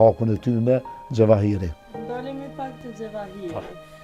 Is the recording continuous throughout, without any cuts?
yes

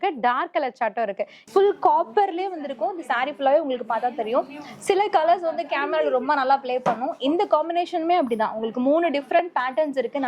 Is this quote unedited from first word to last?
no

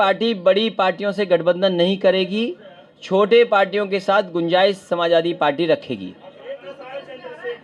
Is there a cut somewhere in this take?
yes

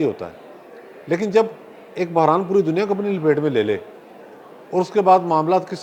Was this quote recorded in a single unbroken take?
yes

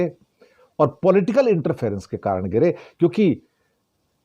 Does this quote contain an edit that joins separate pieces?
no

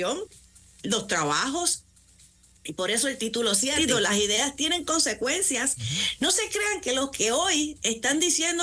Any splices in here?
yes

